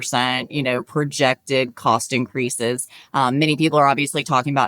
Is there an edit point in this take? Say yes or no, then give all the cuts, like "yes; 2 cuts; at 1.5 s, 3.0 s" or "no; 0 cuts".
no; 0 cuts